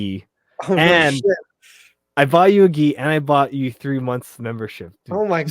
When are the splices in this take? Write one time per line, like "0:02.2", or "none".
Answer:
none